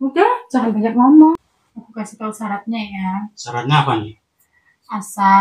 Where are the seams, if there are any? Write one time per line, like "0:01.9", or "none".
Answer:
0:01.3